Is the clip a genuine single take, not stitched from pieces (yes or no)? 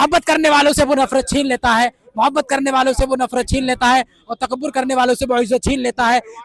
yes